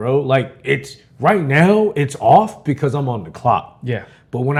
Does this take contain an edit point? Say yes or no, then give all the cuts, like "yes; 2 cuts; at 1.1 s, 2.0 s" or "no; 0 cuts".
no; 0 cuts